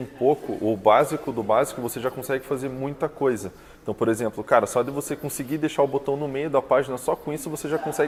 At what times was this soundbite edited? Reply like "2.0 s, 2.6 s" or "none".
none